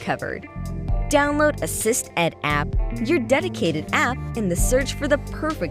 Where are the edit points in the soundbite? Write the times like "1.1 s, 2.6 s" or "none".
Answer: none